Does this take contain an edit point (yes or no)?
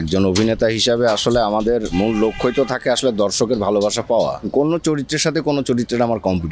yes